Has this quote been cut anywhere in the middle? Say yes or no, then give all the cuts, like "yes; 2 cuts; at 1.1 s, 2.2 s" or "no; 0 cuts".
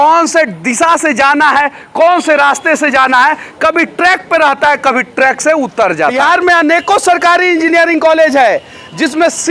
yes; 1 cut; at 6.2 s